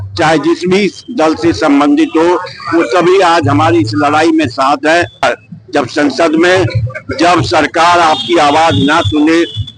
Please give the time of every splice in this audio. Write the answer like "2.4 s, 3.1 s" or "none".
5.2 s